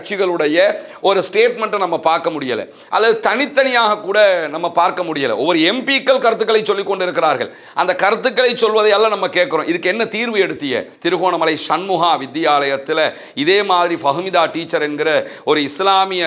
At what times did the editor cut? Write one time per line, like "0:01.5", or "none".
0:10.9